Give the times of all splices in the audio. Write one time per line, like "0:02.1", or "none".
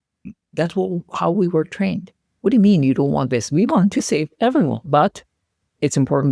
none